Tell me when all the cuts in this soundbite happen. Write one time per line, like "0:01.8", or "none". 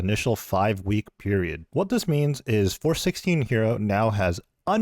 0:01.6